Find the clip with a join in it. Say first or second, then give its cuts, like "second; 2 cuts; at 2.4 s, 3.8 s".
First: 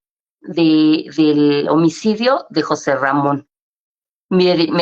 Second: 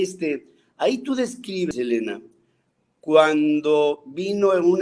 second; 1 cut; at 1.7 s